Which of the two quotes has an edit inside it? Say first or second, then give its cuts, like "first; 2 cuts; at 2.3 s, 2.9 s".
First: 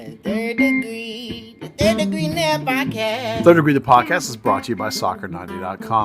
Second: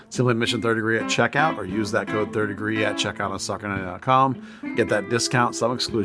first; 1 cut; at 3.4 s